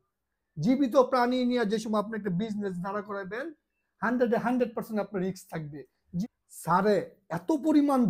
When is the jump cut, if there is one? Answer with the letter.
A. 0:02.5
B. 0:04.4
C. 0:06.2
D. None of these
C